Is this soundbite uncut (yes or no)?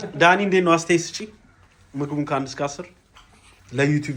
yes